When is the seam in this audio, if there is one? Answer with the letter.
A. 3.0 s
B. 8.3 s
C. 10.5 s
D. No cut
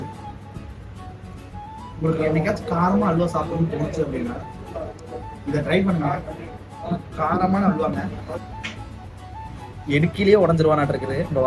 B